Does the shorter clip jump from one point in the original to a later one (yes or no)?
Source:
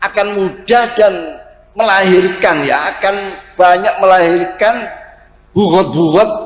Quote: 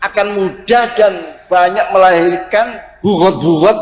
yes